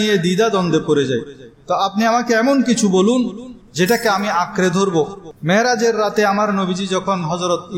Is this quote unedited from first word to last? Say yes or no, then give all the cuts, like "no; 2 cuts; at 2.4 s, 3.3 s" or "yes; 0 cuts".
no; 1 cut; at 5.3 s